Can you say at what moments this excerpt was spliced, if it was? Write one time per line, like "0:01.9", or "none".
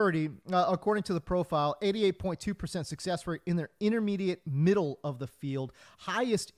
none